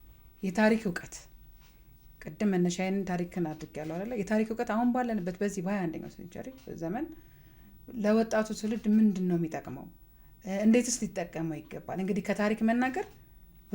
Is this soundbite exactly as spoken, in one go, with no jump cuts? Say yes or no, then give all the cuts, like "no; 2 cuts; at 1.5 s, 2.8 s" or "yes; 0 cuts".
yes; 0 cuts